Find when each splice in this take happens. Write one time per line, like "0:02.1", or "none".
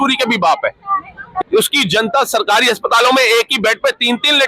0:01.4